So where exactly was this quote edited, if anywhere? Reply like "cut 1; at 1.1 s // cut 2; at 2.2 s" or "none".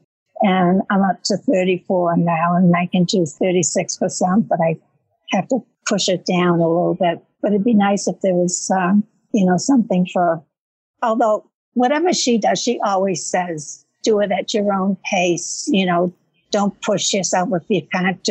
cut 1; at 3.3 s